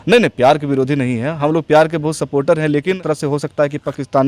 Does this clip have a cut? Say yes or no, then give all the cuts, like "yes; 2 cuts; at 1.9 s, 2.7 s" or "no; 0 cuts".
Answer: yes; 1 cut; at 3.0 s